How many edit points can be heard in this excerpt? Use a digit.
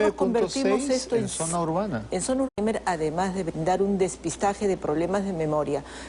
0